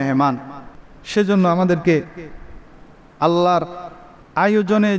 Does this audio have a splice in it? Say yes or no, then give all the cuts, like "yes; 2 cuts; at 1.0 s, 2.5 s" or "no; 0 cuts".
no; 0 cuts